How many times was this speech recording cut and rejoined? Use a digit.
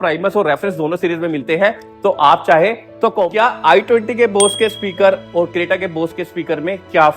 1